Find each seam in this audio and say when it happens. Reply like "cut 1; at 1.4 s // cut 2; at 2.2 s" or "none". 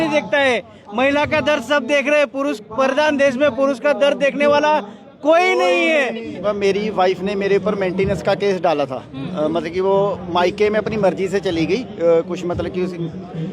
cut 1; at 6.4 s